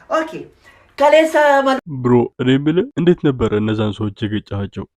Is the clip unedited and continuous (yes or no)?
no